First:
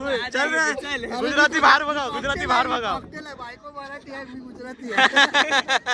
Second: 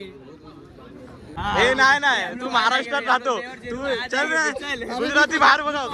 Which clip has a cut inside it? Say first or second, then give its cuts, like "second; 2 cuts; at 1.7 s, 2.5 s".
second; 1 cut; at 1.2 s